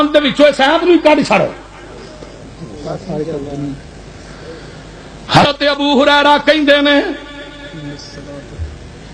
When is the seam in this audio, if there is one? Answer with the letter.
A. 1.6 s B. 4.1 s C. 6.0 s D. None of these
D